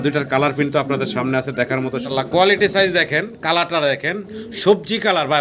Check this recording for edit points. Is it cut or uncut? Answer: cut